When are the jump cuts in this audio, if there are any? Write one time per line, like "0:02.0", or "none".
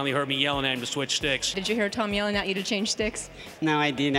0:01.6